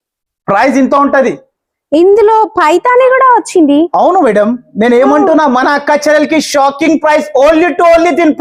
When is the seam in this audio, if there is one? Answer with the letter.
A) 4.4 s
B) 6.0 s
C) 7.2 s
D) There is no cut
D